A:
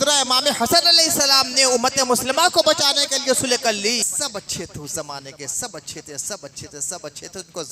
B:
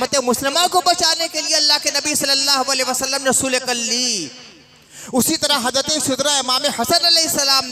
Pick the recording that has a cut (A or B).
A